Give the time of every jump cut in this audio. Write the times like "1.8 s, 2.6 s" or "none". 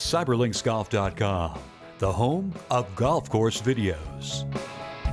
4.2 s

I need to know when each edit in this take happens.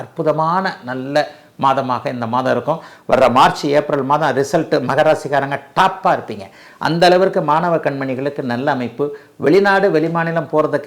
none

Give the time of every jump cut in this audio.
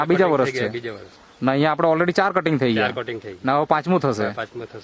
none

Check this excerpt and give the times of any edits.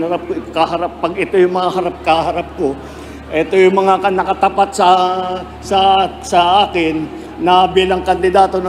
none

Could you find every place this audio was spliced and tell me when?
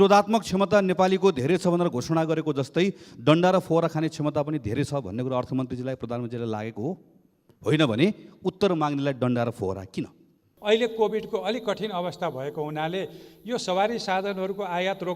10.5 s

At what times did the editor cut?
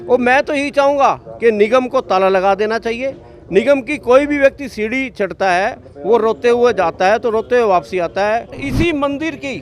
8.6 s

